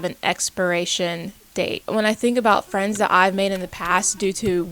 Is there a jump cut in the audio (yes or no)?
yes